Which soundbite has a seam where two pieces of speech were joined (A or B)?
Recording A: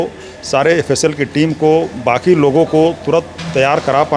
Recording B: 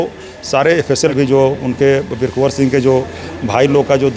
B